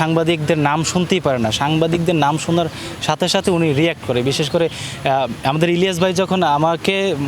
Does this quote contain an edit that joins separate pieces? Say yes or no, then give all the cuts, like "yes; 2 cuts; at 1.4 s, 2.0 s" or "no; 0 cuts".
no; 0 cuts